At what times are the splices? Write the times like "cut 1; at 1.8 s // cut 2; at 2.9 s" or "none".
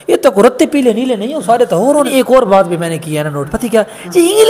cut 1; at 1.9 s

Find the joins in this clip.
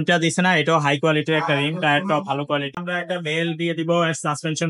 cut 1; at 2.8 s

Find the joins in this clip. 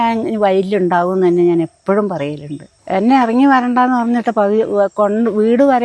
none

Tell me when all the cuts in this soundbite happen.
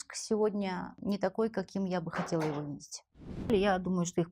cut 1; at 0.9 s // cut 2; at 3.5 s

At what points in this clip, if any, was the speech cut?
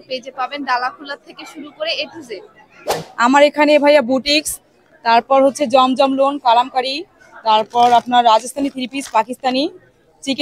cut 1; at 3.0 s

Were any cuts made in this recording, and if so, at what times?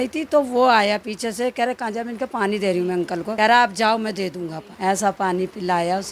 cut 1; at 3.3 s

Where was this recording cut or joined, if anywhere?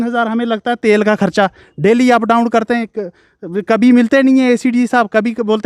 none

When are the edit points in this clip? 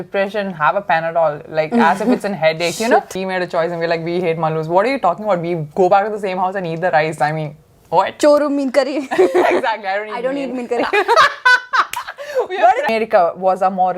cut 1; at 3.2 s // cut 2; at 12.9 s

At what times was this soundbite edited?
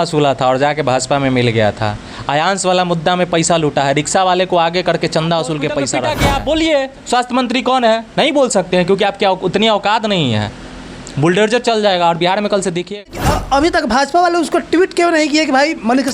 cut 1; at 6.0 s // cut 2; at 13.0 s

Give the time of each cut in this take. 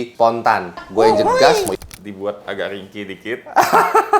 cut 1; at 1.7 s

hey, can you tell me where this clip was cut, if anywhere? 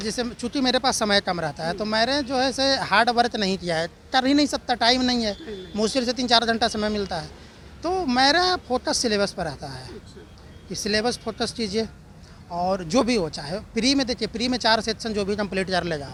none

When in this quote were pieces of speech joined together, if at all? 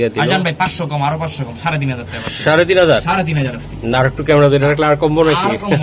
none

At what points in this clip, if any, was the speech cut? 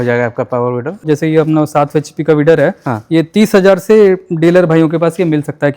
cut 1; at 1.0 s

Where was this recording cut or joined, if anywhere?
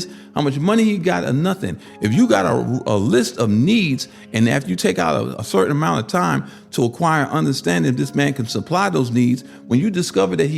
cut 1; at 5.4 s

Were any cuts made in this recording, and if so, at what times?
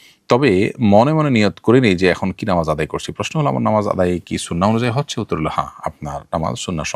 none

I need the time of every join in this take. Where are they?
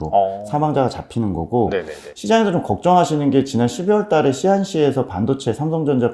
cut 1; at 2.1 s

